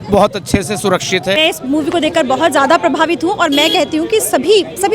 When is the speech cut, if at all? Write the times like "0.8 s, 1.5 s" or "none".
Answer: 1.4 s